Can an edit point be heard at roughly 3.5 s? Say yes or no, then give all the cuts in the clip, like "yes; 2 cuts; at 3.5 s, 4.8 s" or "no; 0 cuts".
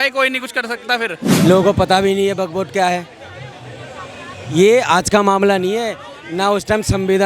no; 1 cut; at 1.3 s